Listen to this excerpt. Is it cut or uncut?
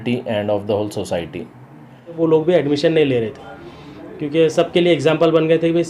cut